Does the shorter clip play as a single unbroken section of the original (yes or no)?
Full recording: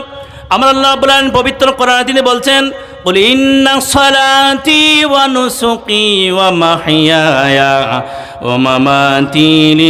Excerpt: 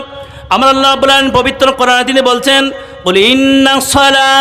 yes